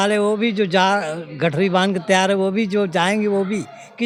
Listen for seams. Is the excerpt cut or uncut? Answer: uncut